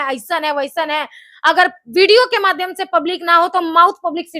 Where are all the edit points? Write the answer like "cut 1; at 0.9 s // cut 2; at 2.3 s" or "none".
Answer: none